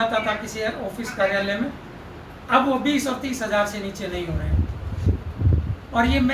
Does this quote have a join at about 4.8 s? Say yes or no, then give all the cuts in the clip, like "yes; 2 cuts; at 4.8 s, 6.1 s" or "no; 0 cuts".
no; 0 cuts